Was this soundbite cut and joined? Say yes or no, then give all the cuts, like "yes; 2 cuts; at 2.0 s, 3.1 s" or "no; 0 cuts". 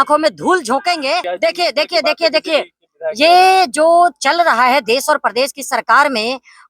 yes; 1 cut; at 1.3 s